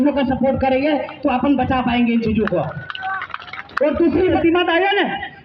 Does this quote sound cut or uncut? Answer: cut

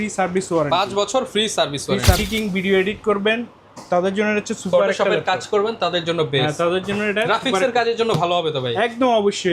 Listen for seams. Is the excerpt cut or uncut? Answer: cut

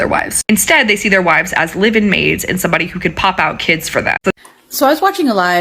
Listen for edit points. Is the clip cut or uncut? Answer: cut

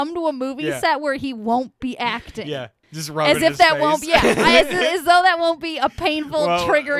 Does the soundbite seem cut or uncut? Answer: uncut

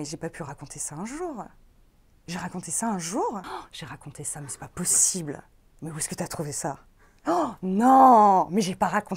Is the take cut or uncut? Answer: cut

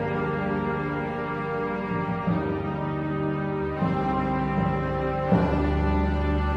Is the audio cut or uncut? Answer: cut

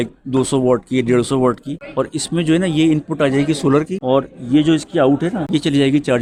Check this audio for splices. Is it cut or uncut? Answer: uncut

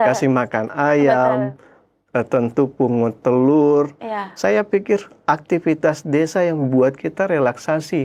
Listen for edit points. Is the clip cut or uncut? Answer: uncut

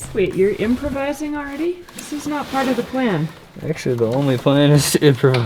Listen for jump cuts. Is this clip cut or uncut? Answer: cut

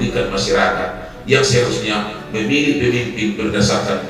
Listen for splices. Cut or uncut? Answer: uncut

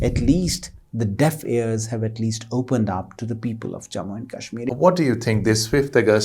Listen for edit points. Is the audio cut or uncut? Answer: cut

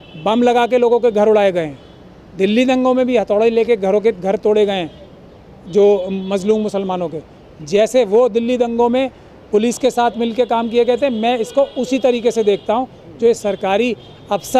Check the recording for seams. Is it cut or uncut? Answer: uncut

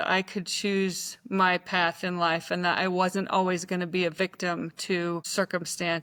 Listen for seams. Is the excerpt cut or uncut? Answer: uncut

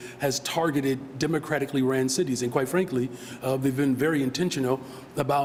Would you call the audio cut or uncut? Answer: uncut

